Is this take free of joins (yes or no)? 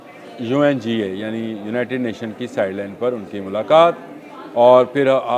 yes